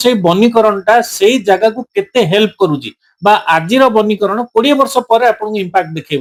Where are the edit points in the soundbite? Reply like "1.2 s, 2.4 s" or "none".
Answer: none